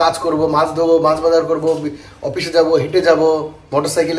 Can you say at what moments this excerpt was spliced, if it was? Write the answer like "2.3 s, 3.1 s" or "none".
none